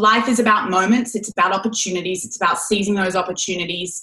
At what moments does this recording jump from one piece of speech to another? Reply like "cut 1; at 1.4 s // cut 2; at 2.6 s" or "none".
none